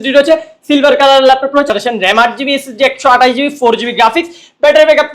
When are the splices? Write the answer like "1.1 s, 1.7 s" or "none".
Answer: 1.7 s